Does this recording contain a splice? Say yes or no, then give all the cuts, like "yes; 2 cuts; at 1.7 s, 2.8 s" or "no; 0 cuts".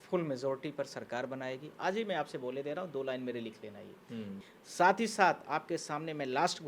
yes; 1 cut; at 4.4 s